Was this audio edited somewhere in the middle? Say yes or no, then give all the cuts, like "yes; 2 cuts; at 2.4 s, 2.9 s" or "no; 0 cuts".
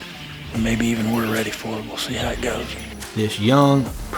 yes; 1 cut; at 2.9 s